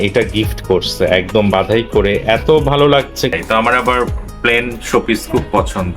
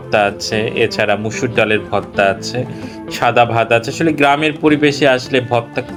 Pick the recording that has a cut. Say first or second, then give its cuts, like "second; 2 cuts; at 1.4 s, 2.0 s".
first; 1 cut; at 3.3 s